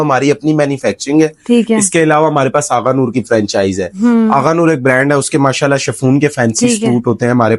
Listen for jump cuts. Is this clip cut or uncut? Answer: uncut